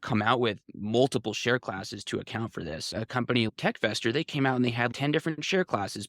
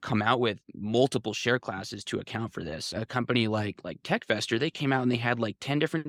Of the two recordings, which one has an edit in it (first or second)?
first